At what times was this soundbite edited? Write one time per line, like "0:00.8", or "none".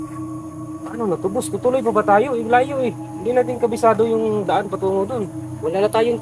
0:00.9